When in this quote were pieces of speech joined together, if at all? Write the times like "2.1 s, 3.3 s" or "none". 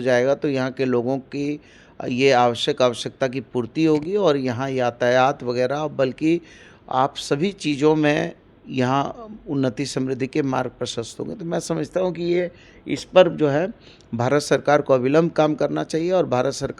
none